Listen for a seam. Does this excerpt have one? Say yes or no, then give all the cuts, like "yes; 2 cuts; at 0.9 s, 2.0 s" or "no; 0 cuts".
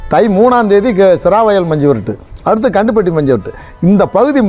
no; 0 cuts